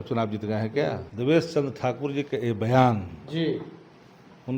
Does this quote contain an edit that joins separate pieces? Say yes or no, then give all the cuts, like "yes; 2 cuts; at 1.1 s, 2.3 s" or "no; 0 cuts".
yes; 1 cut; at 1.1 s